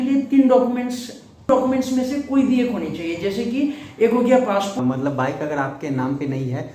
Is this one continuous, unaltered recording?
no; 2 cuts; at 1.5 s, 4.7 s

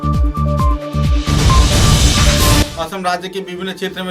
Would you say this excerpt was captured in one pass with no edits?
no; 1 cut; at 2.7 s

